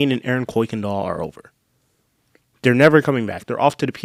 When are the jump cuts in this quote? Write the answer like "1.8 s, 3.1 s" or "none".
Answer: none